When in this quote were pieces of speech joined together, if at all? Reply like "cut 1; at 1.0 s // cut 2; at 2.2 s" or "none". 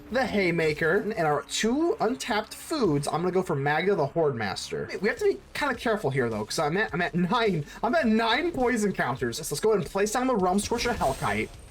cut 1; at 1.1 s // cut 2; at 5.0 s // cut 3; at 9.5 s